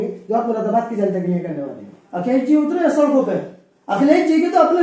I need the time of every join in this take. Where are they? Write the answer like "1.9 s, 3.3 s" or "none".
2.0 s